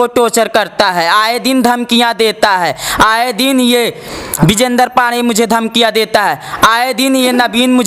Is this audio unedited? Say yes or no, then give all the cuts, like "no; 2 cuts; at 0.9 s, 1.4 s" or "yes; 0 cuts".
yes; 0 cuts